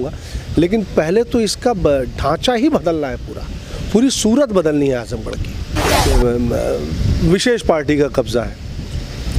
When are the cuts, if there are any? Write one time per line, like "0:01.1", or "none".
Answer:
0:06.0